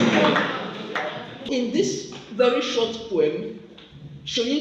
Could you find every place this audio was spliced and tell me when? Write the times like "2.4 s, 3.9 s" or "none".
1.5 s